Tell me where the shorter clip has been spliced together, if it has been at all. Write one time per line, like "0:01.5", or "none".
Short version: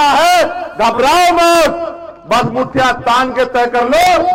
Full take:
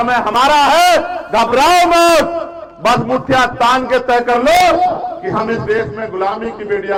none